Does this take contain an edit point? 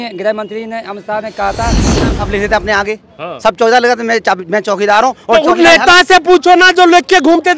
yes; 1 cut; at 2.0 s

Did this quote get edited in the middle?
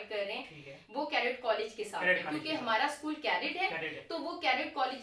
no; 0 cuts

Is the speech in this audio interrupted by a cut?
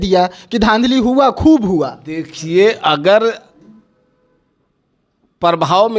no; 0 cuts

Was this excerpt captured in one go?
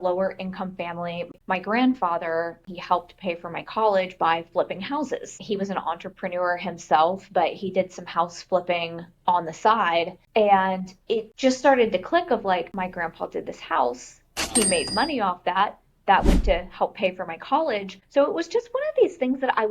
no; 4 cuts; at 1.2 s, 2.7 s, 10.2 s, 11.3 s

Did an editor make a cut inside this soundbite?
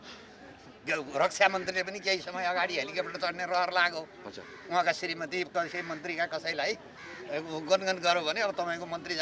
no; 0 cuts

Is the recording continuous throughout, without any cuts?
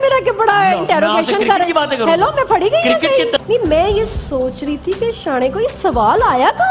no; 1 cut; at 3.4 s

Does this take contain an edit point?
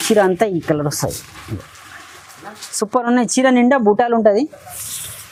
no; 0 cuts

